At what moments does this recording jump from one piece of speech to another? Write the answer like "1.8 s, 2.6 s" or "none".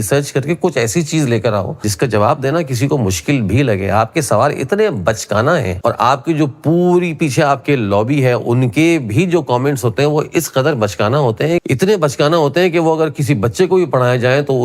1.9 s, 5.7 s